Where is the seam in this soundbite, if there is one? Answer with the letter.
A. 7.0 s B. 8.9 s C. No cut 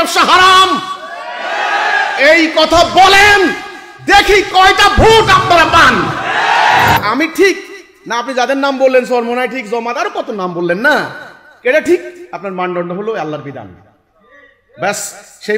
A